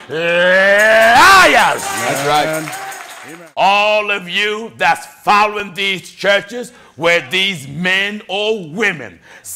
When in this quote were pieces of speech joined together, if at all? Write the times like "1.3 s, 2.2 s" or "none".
3.2 s